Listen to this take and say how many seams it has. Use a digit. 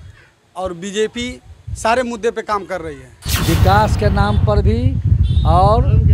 1